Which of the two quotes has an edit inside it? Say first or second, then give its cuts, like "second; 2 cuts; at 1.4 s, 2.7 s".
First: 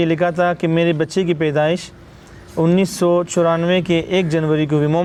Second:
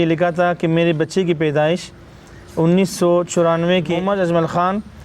second; 1 cut; at 4.0 s